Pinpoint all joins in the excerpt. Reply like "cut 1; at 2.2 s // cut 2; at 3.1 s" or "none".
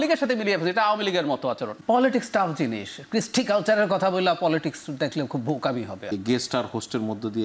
cut 1; at 1.7 s // cut 2; at 6.1 s